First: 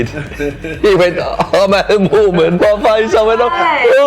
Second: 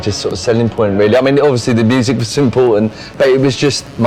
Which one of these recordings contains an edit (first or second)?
first